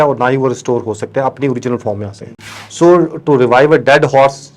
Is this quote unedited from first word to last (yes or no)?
yes